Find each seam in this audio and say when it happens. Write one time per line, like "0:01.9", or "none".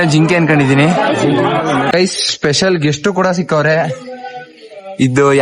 0:01.9